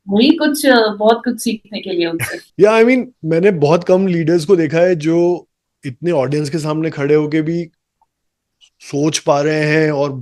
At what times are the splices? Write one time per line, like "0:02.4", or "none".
0:02.4